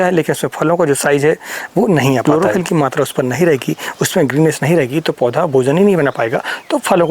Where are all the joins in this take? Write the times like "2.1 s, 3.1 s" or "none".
2.2 s